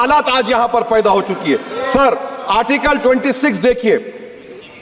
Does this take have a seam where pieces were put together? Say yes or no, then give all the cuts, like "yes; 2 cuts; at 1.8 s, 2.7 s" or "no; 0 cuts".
no; 0 cuts